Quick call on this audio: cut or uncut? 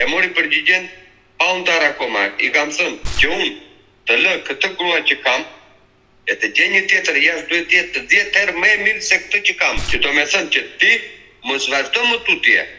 cut